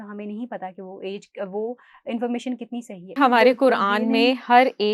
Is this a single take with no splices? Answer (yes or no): no